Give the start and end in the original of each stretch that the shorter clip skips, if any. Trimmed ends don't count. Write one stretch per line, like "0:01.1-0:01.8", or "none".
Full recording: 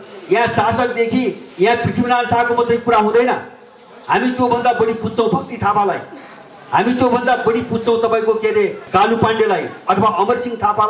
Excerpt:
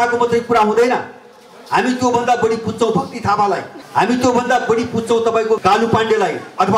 0:06.1-0:06.5
0:08.4-0:08.9